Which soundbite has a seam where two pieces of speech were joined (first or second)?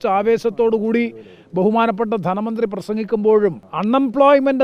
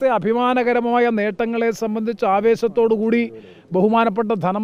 first